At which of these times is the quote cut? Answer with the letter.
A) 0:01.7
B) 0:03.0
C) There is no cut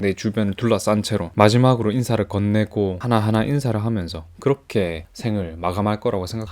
B